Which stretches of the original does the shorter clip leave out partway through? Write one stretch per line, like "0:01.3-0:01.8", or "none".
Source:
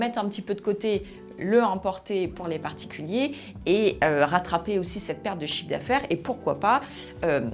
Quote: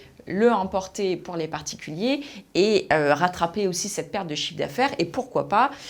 none